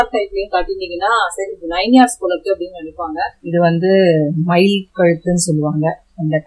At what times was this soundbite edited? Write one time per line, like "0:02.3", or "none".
0:03.4